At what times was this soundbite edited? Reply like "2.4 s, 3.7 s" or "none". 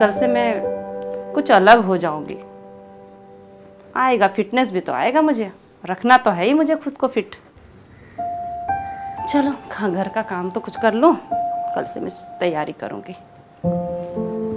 none